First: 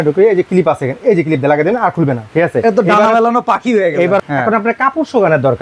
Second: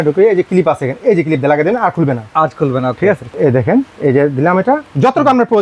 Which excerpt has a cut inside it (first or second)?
first